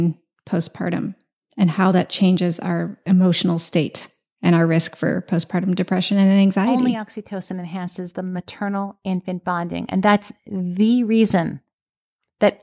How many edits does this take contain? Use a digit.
2